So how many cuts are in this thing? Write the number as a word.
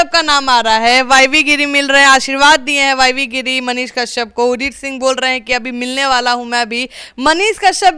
zero